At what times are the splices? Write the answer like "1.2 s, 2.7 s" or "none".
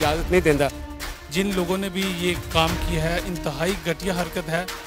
none